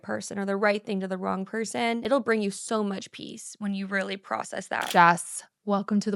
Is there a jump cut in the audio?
yes; 2 cuts; at 2.0 s, 4.9 s

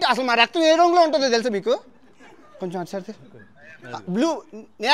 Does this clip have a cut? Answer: no; 0 cuts

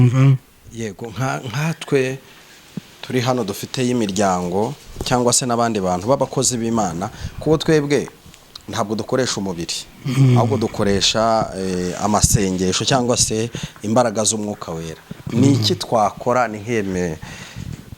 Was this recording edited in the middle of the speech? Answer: yes; 1 cut; at 0.9 s

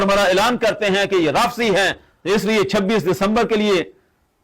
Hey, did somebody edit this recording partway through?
yes; 1 cut; at 2.1 s

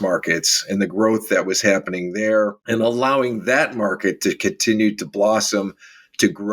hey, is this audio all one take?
no; 1 cut; at 2.6 s

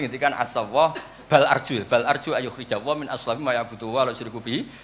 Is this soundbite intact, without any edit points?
yes; 0 cuts

